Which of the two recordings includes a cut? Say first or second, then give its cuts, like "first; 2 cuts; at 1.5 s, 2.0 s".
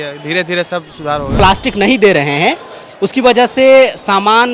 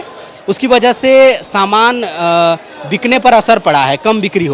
first; 1 cut; at 1.3 s